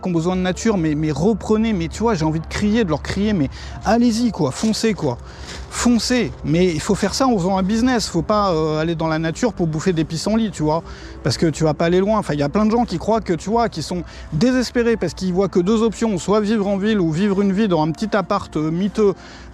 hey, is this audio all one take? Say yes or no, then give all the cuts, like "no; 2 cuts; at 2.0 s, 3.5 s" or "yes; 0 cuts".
yes; 0 cuts